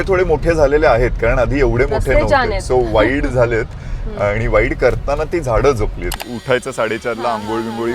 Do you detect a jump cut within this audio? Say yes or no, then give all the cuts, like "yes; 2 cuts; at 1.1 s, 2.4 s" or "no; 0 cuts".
yes; 1 cut; at 6.2 s